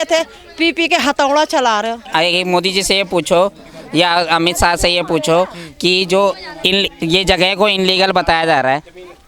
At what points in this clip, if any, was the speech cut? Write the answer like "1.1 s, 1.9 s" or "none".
2.0 s